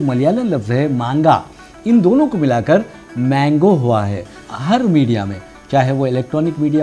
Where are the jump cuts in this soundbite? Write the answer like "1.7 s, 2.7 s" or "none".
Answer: 4.4 s